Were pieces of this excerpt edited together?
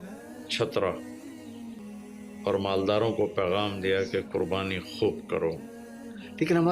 yes; 1 cut; at 1.8 s

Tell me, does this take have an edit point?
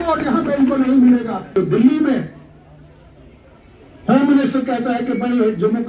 yes; 1 cut; at 1.5 s

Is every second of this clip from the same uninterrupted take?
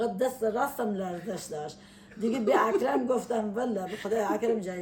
yes; 0 cuts

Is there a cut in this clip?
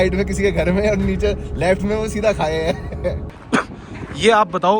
yes; 1 cut; at 3.3 s

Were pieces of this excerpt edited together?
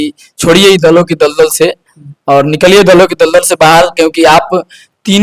no; 0 cuts

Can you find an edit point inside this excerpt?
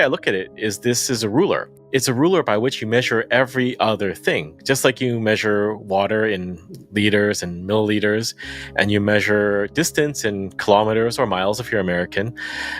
yes; 1 cut; at 1.7 s

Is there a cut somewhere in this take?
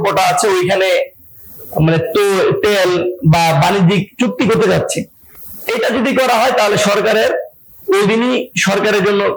no; 0 cuts

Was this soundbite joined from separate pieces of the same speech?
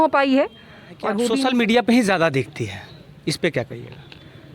yes; 1 cut; at 1.3 s

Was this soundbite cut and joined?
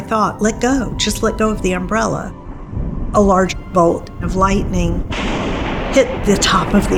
no; 0 cuts

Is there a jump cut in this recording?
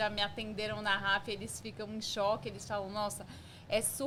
no; 0 cuts

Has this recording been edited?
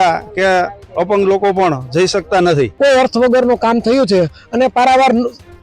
yes; 1 cut; at 2.7 s

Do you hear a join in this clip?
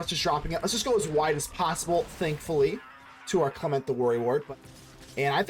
yes; 1 cut; at 4.4 s

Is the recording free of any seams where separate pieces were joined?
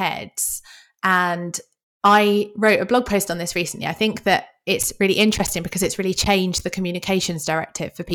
yes; 0 cuts

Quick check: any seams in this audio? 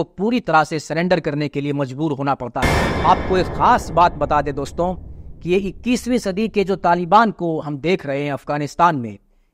yes; 1 cut; at 2.8 s

